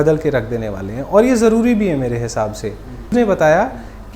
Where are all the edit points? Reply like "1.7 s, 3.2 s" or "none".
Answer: 3.1 s